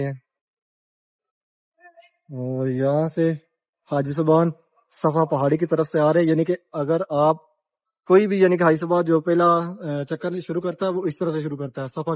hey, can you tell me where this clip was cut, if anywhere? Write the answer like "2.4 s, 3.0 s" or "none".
none